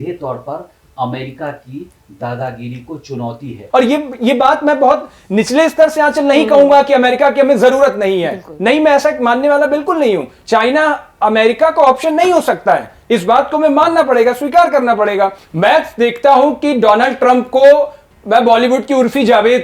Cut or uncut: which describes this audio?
cut